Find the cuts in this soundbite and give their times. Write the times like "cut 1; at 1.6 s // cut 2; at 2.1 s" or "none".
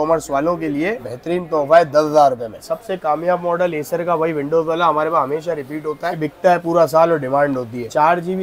cut 1; at 1.0 s // cut 2; at 2.7 s